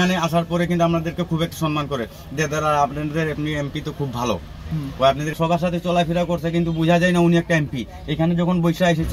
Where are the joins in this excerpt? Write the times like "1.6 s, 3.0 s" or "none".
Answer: 5.4 s

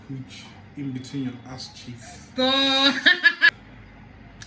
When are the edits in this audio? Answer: 3.5 s

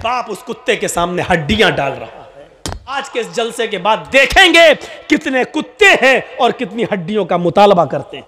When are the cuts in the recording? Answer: 3.0 s

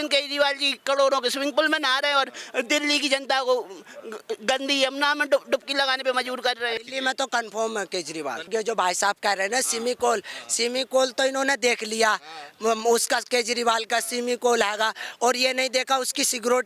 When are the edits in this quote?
6.9 s, 8.5 s

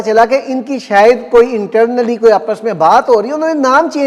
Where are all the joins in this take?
none

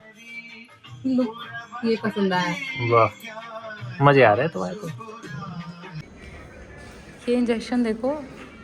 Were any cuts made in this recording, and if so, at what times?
6.0 s

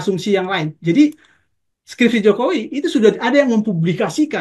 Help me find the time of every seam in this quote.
none

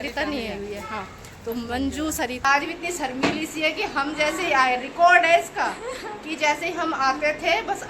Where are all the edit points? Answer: 2.5 s

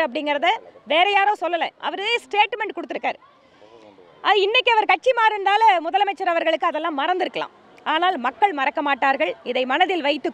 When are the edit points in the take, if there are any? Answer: none

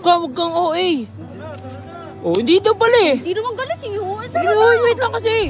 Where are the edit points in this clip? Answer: none

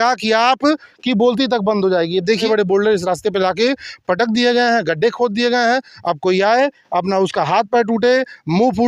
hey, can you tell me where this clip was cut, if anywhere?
2.4 s

